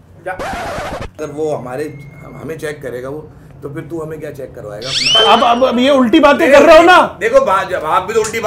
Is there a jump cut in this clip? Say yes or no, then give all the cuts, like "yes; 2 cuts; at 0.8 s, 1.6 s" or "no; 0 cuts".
yes; 1 cut; at 1.2 s